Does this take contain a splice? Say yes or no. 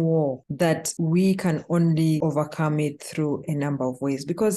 yes